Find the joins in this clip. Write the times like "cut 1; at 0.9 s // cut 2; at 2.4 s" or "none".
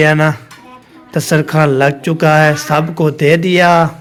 none